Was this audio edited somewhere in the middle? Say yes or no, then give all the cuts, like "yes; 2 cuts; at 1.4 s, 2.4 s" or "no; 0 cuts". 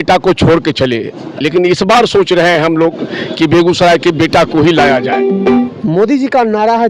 no; 0 cuts